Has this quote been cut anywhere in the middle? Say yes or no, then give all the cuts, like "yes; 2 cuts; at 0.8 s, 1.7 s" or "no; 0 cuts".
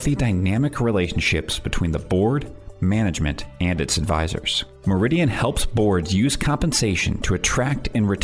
no; 0 cuts